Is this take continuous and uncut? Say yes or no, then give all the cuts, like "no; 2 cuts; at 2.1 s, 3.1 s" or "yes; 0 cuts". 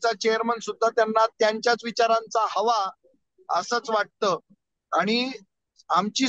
yes; 0 cuts